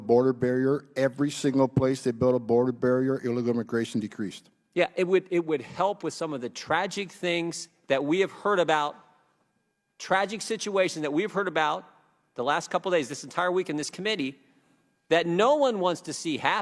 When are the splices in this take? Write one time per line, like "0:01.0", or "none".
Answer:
none